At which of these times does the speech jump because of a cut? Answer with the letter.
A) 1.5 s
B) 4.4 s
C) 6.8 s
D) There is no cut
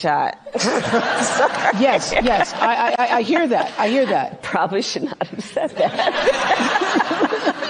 B